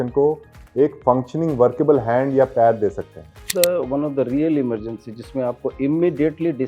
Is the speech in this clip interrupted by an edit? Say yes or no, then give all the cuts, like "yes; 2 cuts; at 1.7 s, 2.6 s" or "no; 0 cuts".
yes; 1 cut; at 3.4 s